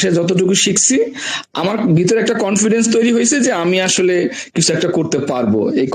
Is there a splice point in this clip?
no; 0 cuts

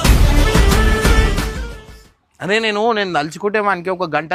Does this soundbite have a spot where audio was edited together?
no; 0 cuts

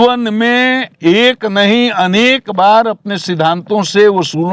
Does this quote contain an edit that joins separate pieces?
no; 0 cuts

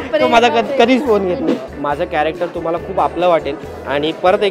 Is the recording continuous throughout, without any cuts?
no; 1 cut; at 1.7 s

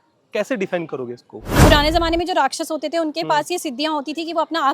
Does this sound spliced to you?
yes; 1 cut; at 1.6 s

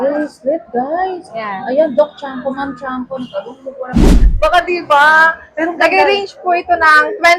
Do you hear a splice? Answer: yes; 1 cut; at 4.1 s

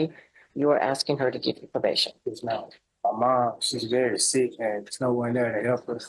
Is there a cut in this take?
yes; 1 cut; at 2.8 s

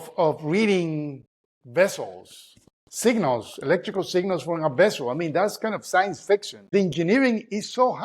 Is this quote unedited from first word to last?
no; 1 cut; at 6.7 s

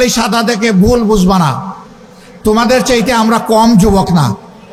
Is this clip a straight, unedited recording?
yes; 0 cuts

